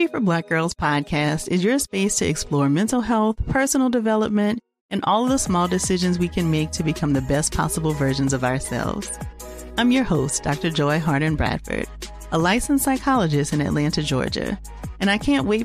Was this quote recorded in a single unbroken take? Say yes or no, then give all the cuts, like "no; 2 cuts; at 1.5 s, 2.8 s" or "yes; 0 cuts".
yes; 0 cuts